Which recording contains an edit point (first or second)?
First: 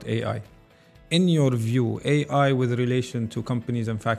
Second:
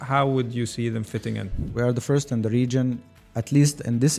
second